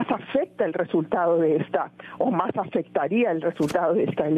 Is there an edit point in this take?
no; 0 cuts

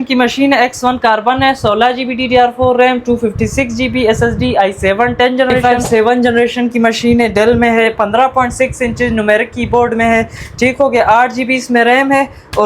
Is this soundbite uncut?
no; 1 cut; at 5.6 s

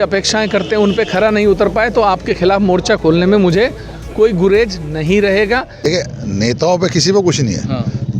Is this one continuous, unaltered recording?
no; 1 cut; at 5.8 s

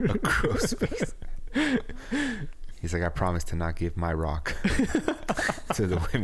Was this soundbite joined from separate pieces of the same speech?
no; 0 cuts

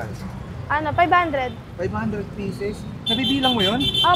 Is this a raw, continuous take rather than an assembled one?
yes; 0 cuts

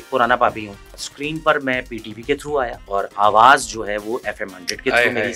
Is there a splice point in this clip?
yes; 2 cuts; at 1.0 s, 2.8 s

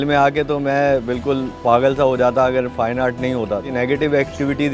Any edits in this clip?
no; 0 cuts

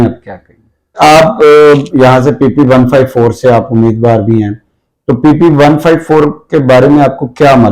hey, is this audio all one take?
no; 1 cut; at 1.0 s

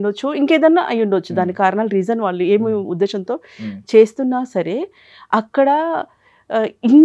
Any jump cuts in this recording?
no; 0 cuts

